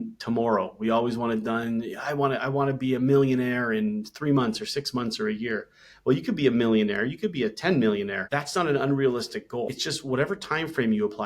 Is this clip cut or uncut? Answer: cut